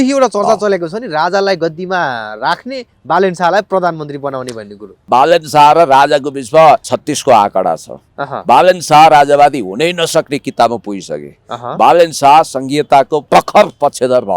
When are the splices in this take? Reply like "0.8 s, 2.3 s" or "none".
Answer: 5.1 s, 6.9 s, 13.2 s